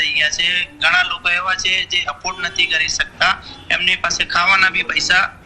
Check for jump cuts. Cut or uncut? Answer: cut